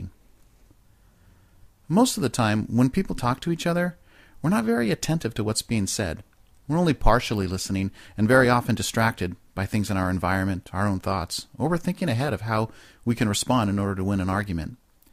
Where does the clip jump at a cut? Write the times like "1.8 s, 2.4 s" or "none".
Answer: 13.2 s